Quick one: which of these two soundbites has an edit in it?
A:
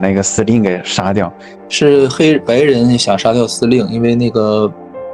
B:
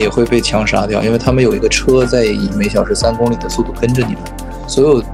A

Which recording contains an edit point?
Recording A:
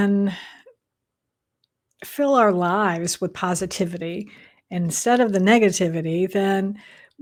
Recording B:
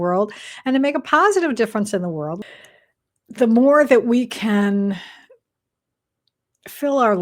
B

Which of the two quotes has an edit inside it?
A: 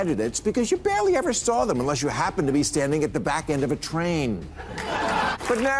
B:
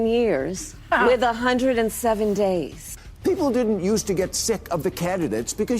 B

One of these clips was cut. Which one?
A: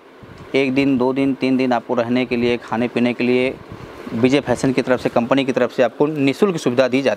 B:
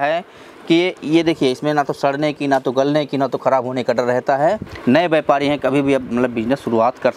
B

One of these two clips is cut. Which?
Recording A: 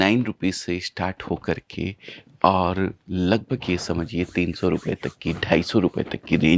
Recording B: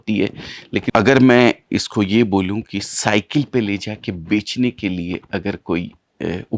B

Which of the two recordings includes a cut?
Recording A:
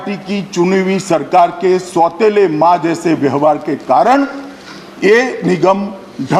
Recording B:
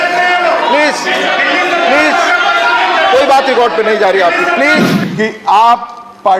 B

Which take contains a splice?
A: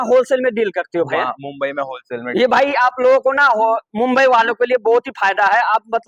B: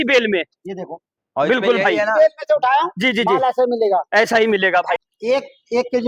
B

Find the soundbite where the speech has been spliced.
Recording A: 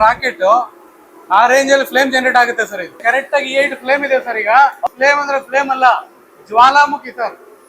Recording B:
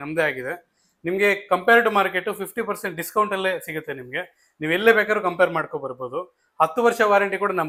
A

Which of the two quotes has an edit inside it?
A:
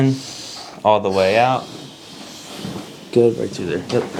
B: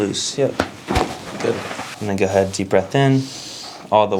B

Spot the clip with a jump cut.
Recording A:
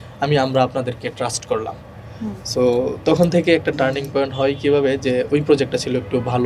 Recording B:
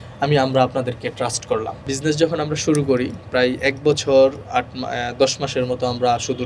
B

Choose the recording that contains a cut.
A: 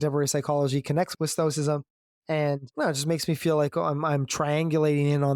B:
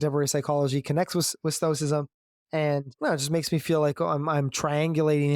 A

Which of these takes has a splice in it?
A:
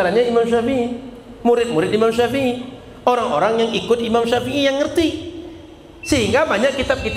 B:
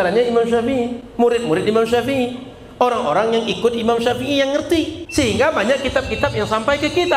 B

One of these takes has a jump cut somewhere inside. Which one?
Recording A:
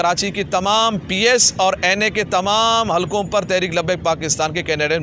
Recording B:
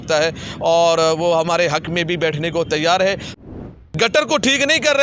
B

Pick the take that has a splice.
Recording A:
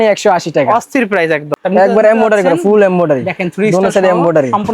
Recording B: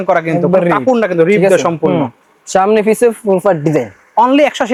A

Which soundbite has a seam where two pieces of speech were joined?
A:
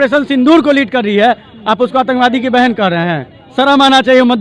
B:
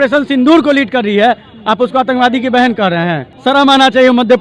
B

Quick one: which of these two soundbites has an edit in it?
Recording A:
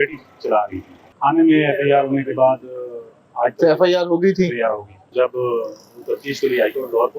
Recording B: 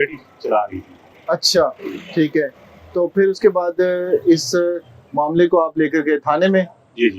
A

